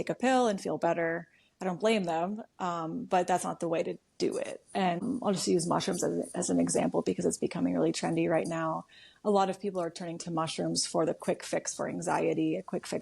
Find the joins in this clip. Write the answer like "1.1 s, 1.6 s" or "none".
5.0 s

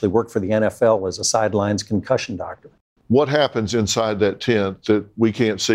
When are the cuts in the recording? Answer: 2.9 s

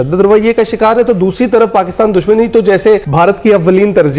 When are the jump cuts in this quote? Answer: 3.1 s

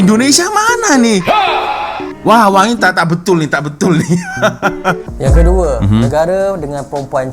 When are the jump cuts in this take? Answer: 5.1 s

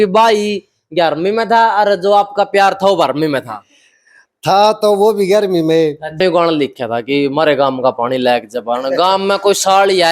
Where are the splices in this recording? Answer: 6.1 s

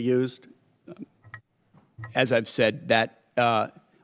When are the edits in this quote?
1.1 s

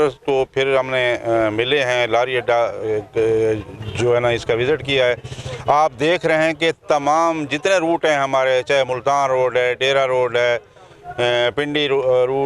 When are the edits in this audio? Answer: none

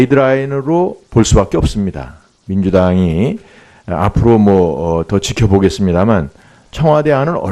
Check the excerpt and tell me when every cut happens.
5.8 s

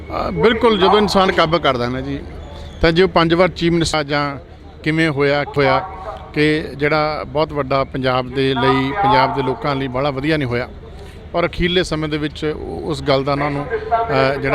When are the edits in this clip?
3.9 s, 5.5 s

